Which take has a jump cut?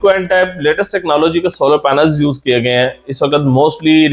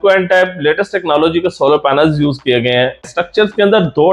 second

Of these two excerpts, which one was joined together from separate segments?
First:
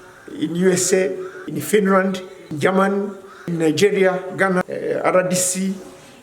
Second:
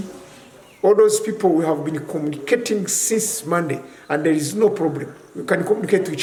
first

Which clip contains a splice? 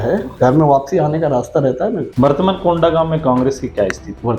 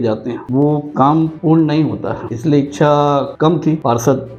first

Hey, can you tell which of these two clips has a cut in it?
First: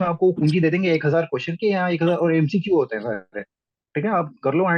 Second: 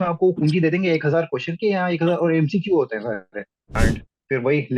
second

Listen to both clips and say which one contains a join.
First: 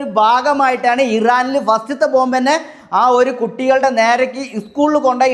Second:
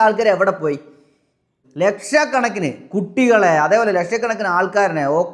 second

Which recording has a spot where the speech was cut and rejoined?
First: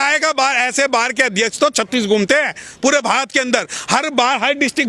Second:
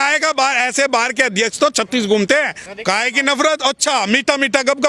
second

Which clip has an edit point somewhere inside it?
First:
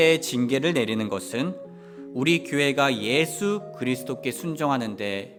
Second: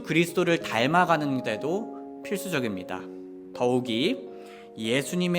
second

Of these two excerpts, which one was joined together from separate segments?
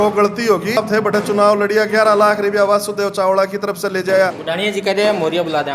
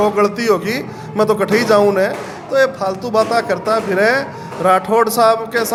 first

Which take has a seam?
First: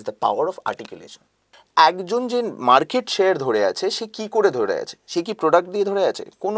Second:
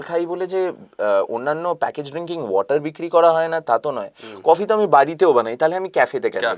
first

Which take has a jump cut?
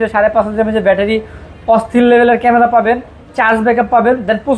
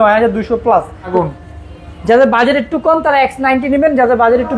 second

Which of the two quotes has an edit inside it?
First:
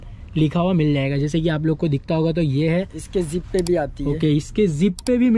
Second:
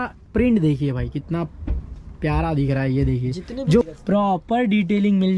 second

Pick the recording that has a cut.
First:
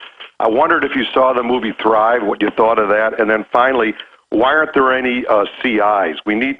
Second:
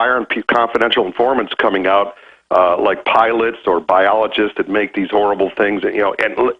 second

